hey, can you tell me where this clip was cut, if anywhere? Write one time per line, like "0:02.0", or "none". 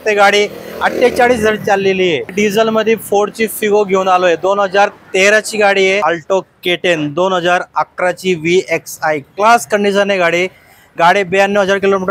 0:02.3
0:06.0